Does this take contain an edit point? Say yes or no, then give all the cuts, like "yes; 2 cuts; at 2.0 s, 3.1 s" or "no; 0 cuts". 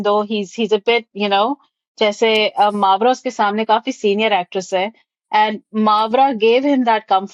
no; 0 cuts